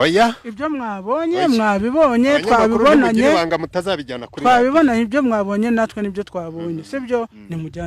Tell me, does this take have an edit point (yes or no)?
no